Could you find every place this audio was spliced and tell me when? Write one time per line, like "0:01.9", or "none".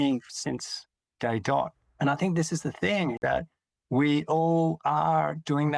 0:01.8
0:03.2